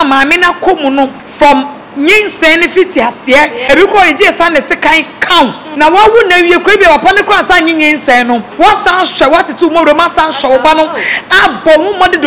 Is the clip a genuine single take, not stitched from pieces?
no; 4 cuts; at 1.2 s, 3.6 s, 5.6 s, 8.5 s

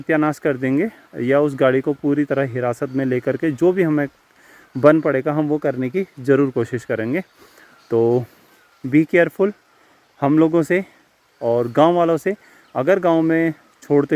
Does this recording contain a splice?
no; 0 cuts

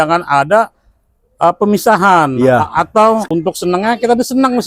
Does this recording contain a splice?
yes; 1 cut; at 3.3 s

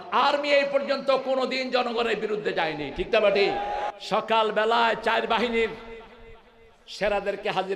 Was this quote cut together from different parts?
yes; 1 cut; at 3.9 s

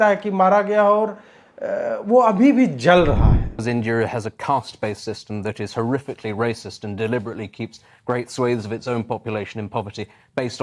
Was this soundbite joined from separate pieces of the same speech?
yes; 1 cut; at 3.6 s

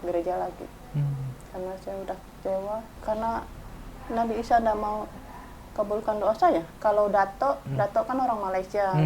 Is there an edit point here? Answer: yes; 2 cuts; at 2.9 s, 6.7 s

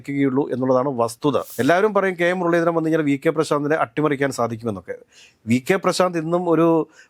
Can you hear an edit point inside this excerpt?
yes; 1 cut; at 1.5 s

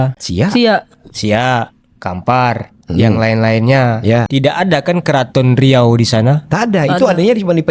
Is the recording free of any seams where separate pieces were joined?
yes; 0 cuts

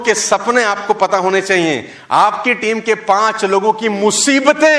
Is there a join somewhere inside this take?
no; 0 cuts

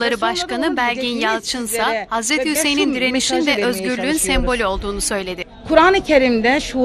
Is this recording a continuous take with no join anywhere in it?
no; 1 cut; at 1.8 s

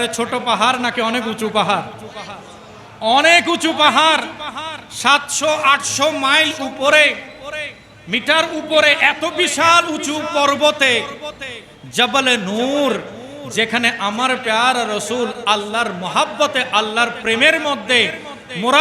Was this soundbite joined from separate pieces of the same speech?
no; 0 cuts

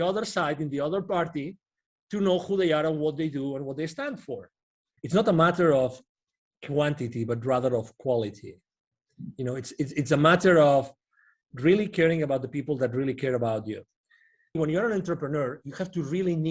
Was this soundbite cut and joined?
yes; 2 cuts; at 4.9 s, 14.6 s

